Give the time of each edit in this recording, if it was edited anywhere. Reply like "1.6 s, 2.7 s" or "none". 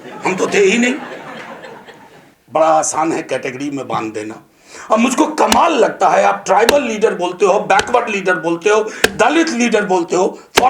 2.3 s